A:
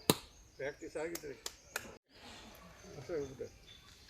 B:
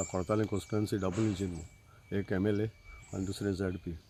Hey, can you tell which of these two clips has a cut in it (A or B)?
A